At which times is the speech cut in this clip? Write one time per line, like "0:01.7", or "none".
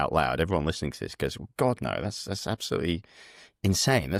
none